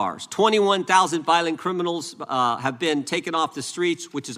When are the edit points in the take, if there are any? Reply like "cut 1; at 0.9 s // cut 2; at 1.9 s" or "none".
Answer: none